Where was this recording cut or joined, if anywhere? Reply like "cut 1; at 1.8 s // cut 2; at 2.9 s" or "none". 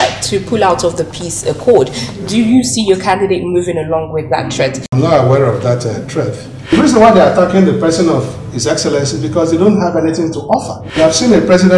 cut 1; at 4.9 s // cut 2; at 6.7 s // cut 3; at 10.8 s

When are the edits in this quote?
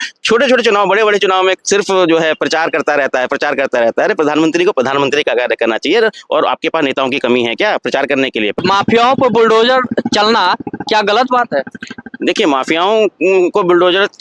cut 1; at 8.6 s

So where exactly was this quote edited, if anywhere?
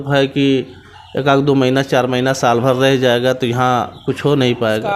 none

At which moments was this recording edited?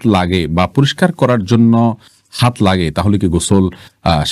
none

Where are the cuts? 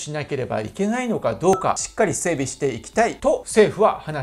cut 1; at 1.6 s // cut 2; at 3.3 s

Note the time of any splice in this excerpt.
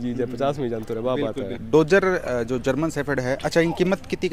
none

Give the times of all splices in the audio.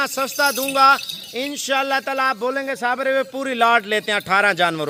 none

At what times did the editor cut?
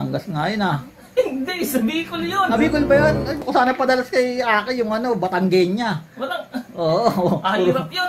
cut 1; at 3.4 s

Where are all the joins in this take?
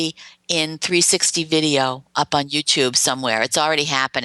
none

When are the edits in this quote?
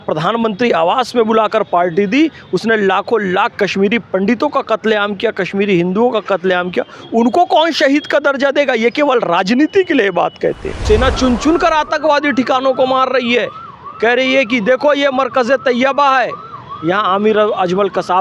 cut 1; at 10.8 s

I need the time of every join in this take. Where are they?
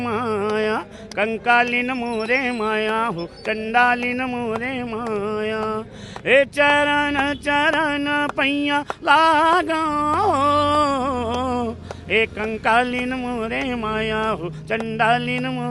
none

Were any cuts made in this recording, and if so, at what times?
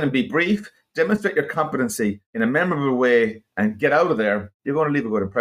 cut 1; at 2.2 s // cut 2; at 4.5 s

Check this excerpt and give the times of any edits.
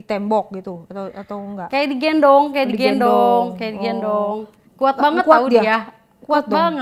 none

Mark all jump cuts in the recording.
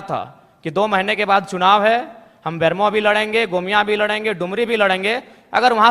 none

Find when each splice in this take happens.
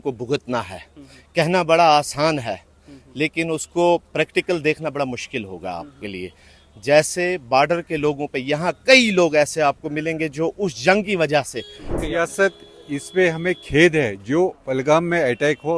cut 1; at 12.0 s

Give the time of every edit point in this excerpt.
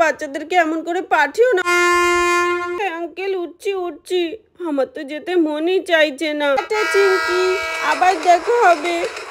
cut 1; at 1.6 s // cut 2; at 2.8 s // cut 3; at 6.6 s

